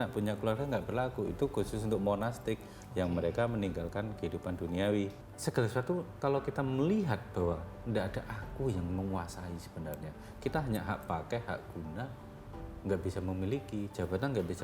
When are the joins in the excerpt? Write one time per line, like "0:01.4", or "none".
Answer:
0:05.3